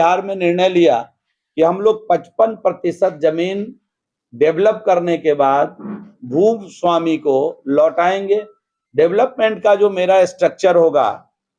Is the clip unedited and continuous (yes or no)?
yes